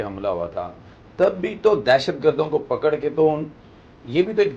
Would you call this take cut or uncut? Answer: uncut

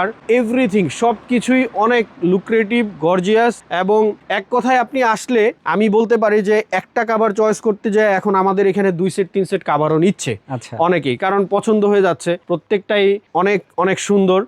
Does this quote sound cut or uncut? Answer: uncut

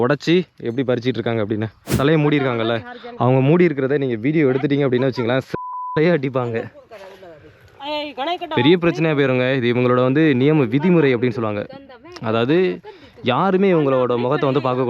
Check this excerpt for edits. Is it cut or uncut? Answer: cut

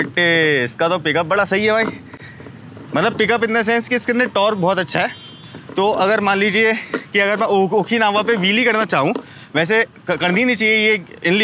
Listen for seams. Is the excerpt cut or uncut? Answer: uncut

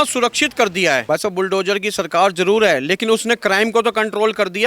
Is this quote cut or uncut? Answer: cut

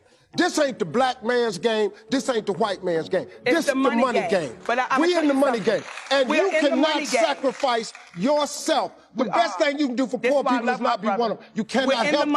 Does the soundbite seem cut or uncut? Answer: uncut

